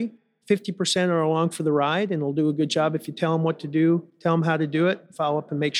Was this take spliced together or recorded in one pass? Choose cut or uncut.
cut